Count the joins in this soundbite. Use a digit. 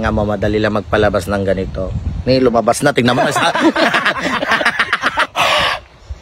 1